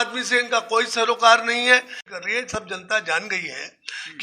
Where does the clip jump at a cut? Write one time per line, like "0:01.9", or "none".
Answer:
0:02.1